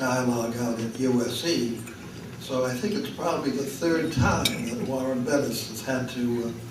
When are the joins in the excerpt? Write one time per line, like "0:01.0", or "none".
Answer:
0:03.1